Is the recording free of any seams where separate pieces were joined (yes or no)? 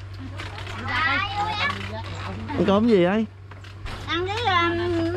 yes